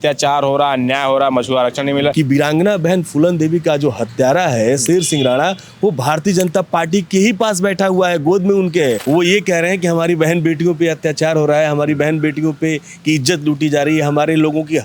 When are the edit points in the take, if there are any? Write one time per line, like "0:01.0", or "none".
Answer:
0:02.1
0:09.0